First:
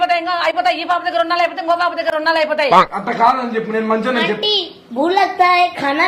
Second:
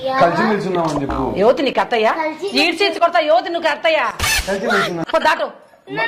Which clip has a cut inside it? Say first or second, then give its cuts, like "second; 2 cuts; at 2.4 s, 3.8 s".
second; 1 cut; at 5.0 s